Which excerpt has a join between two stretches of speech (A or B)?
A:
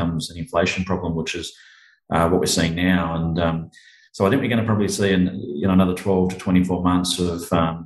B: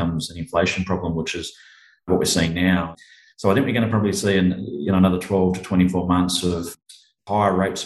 B